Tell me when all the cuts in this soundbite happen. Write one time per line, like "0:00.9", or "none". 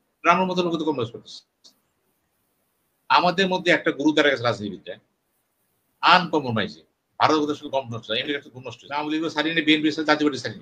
0:09.0